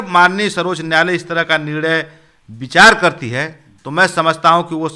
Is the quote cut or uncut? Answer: uncut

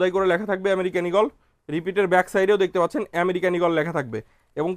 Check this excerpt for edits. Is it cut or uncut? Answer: uncut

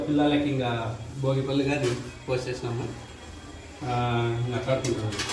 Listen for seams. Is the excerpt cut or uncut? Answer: uncut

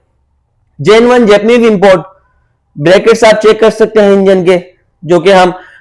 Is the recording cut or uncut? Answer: uncut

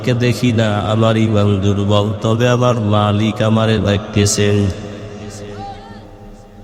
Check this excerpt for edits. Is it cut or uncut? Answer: uncut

